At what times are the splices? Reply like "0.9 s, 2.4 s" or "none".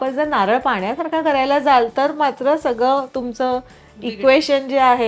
none